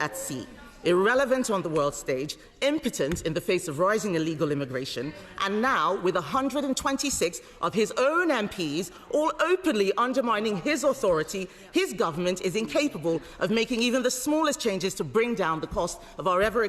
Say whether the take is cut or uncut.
uncut